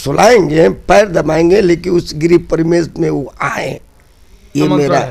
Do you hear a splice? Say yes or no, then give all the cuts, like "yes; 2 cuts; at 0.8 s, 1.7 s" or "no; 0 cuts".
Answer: no; 0 cuts